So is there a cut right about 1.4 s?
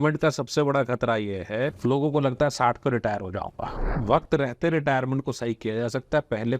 no; 1 cut; at 4.0 s

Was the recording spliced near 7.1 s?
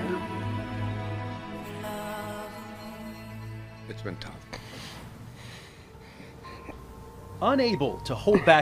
yes; 1 cut; at 7.1 s

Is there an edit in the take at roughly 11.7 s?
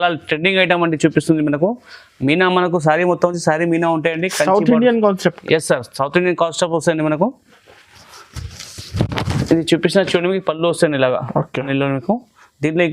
yes; 1 cut; at 11.7 s

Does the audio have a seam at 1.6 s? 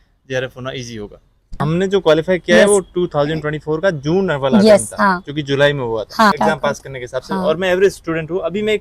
yes; 2 cuts; at 1.6 s, 6.3 s

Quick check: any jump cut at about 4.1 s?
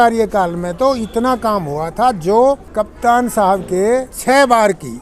yes; 2 cuts; at 2.6 s, 4.1 s

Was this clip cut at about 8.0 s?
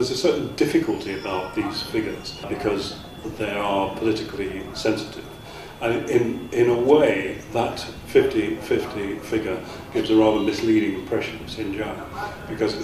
no; 1 cut; at 10.1 s

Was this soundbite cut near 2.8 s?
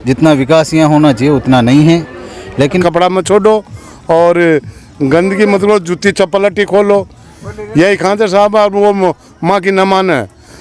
yes; 1 cut; at 2.8 s

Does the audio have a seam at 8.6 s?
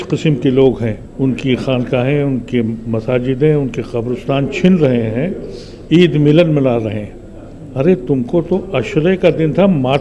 no; 1 cut; at 1.0 s

